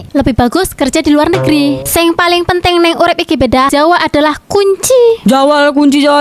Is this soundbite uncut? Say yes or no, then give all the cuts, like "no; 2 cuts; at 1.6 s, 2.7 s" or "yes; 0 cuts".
no; 3 cuts; at 1.8 s, 3.7 s, 5.2 s